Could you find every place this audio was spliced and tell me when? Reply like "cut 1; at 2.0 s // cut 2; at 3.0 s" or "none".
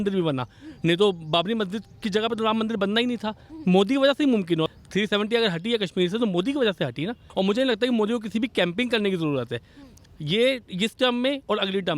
cut 1; at 4.7 s // cut 2; at 7.2 s